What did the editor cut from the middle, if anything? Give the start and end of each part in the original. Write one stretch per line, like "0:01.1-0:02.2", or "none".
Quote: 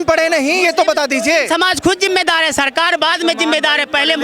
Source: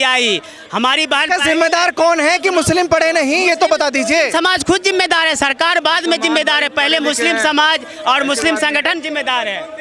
none